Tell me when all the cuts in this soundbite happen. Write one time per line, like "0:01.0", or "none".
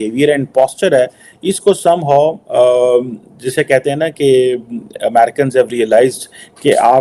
none